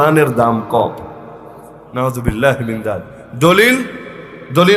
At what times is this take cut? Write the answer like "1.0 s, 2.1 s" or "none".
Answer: none